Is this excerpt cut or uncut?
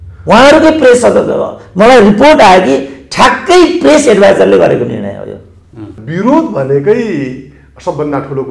cut